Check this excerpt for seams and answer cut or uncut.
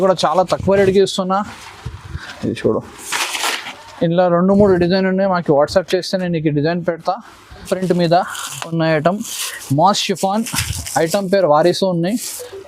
cut